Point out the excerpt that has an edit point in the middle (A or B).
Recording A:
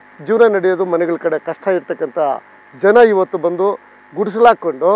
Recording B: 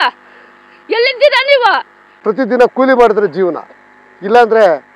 B